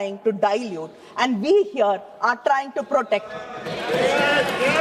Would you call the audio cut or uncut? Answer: uncut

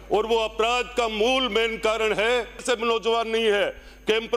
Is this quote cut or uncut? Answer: cut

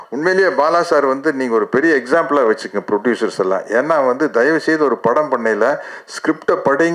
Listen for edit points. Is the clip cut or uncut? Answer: uncut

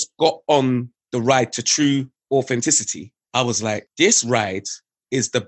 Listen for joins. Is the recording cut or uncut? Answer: cut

